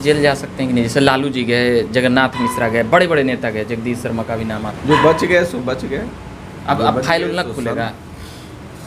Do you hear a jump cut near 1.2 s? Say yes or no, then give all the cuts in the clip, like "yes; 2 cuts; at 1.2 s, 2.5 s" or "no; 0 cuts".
no; 1 cut; at 4.7 s